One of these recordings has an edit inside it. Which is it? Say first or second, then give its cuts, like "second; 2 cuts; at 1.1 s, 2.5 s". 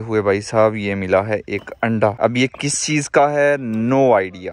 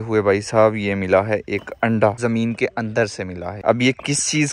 second; 2 cuts; at 2.2 s, 3.6 s